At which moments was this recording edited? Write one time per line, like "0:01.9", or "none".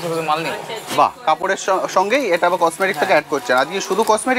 none